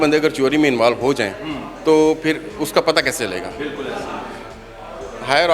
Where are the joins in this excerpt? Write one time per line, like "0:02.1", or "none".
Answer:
none